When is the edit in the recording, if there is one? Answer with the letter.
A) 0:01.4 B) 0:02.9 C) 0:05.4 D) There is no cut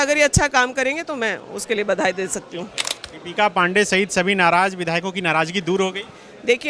B